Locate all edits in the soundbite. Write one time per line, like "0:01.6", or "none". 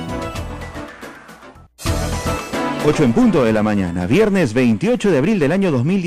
0:01.5